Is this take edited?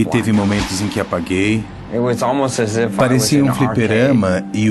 yes; 1 cut; at 1.9 s

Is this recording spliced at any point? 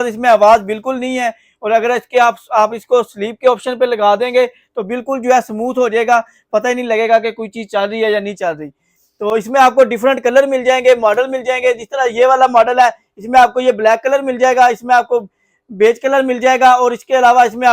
no; 0 cuts

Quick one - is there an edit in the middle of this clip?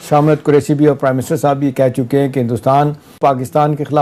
no; 0 cuts

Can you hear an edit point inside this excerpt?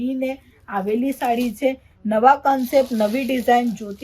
no; 0 cuts

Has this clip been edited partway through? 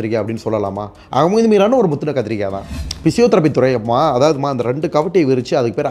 yes; 1 cut; at 2.7 s

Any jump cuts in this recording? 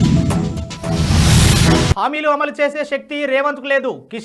yes; 1 cut; at 1.9 s

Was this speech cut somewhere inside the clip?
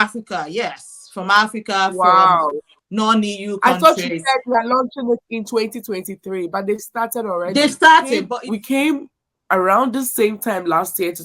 yes; 1 cut; at 8.3 s

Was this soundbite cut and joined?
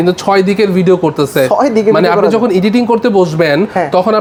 no; 0 cuts

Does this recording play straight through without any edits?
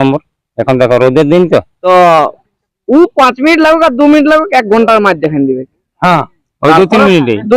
no; 1 cut; at 1.8 s

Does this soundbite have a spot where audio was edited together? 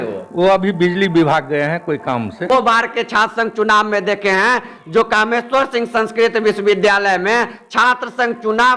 yes; 1 cut; at 2.5 s

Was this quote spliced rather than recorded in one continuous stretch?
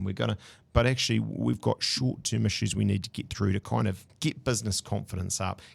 yes; 1 cut; at 4.1 s

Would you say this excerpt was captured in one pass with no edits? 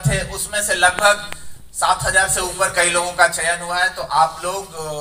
yes; 0 cuts

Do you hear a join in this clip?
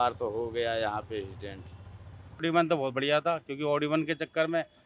yes; 1 cut; at 2.4 s

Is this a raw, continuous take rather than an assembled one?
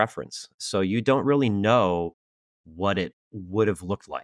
yes; 0 cuts

